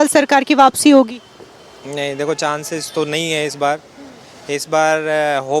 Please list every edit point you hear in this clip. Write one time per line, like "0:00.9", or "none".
none